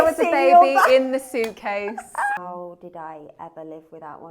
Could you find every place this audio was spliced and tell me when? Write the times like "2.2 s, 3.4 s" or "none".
2.4 s